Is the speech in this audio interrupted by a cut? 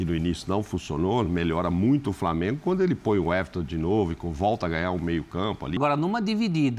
yes; 1 cut; at 5.8 s

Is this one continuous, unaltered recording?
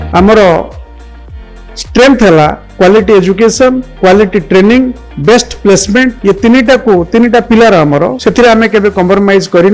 no; 5 cuts; at 2.6 s, 3.9 s, 5.1 s, 6.2 s, 8.2 s

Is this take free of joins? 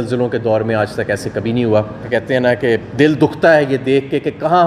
no; 1 cut; at 2.0 s

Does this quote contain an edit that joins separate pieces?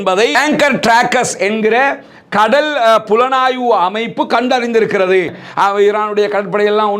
yes; 1 cut; at 5.4 s

